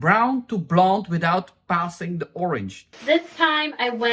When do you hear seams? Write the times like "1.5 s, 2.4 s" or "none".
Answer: 2.9 s